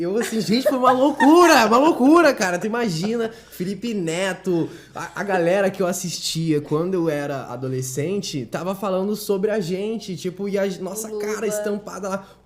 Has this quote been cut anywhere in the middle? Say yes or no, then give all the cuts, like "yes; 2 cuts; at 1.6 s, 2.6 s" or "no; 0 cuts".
no; 0 cuts